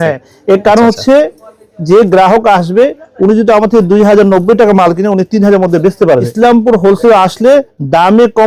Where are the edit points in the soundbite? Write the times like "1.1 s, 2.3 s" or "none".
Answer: 6.3 s